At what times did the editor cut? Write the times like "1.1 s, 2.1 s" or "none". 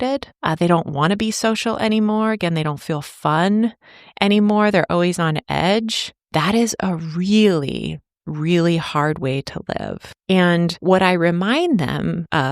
10.1 s, 10.8 s